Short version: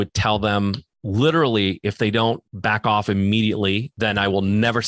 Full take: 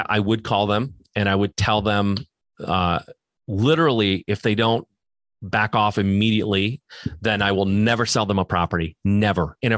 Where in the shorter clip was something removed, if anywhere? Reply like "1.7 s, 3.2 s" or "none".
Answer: 0.9 s, 2.5 s, 3.9 s